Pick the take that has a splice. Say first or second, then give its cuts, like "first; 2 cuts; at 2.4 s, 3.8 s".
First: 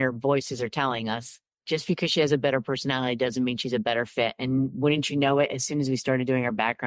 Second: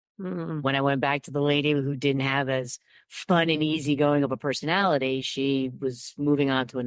first; 1 cut; at 1.6 s